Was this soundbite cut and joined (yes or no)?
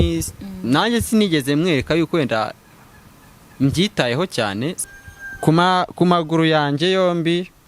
yes